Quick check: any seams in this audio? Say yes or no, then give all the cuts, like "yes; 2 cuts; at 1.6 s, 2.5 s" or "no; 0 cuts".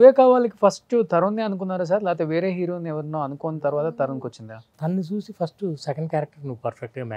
yes; 1 cut; at 4.7 s